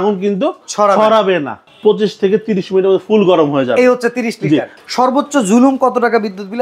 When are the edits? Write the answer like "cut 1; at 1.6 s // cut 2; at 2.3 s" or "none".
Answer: cut 1; at 1.6 s // cut 2; at 4.7 s